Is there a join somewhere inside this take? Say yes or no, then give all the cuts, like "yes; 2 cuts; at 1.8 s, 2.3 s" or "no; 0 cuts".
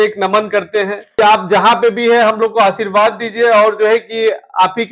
yes; 1 cut; at 1.2 s